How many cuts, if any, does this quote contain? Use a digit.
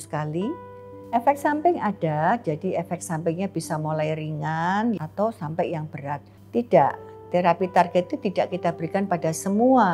3